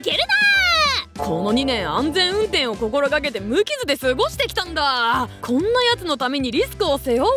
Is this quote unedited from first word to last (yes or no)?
no